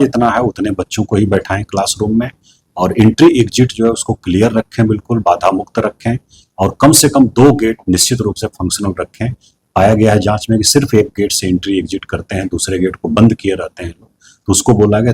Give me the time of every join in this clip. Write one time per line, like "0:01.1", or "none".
none